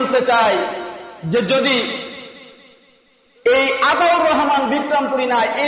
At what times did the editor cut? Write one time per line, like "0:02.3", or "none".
none